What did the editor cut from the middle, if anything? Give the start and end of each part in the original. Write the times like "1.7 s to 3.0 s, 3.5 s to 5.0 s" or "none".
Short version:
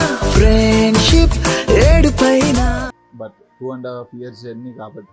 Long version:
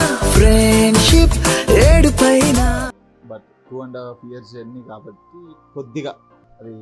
3.0 s to 3.1 s